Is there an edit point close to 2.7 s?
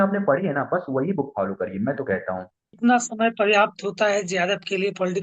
yes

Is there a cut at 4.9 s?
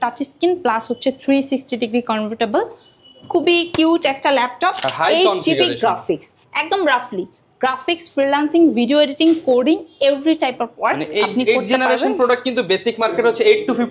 yes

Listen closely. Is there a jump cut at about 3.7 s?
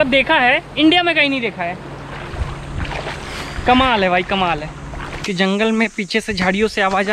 no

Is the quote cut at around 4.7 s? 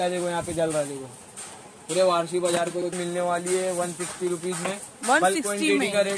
no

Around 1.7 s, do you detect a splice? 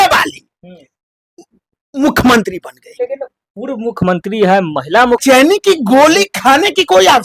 no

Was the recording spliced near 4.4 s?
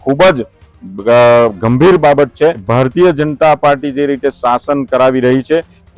no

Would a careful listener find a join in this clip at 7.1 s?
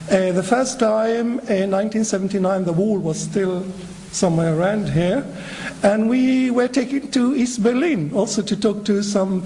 yes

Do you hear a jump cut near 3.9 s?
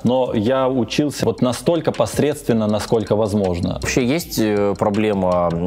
yes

